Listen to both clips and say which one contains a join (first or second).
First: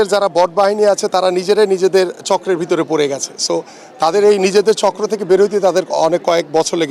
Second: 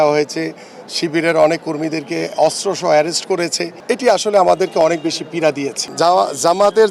second